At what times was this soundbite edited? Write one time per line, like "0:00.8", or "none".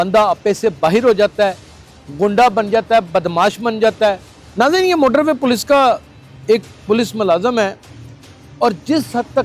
0:04.4